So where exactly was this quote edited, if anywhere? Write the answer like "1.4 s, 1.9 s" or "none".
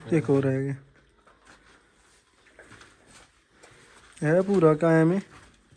none